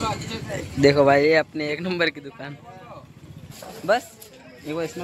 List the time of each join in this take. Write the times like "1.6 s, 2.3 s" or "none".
3.5 s